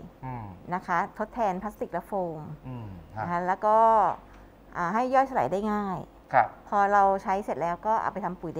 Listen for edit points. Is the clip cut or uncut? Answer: uncut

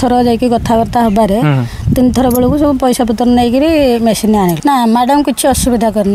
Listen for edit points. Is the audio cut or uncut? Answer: cut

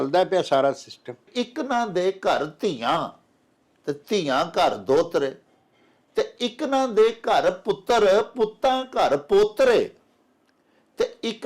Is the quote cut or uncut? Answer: cut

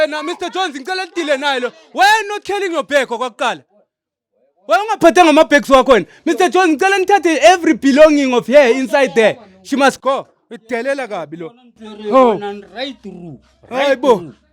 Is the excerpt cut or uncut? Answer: uncut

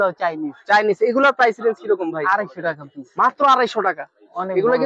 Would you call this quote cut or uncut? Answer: uncut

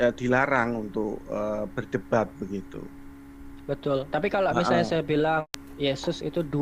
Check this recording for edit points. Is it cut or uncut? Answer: cut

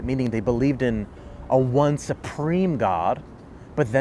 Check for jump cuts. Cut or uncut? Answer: uncut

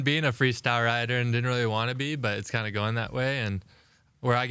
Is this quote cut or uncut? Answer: uncut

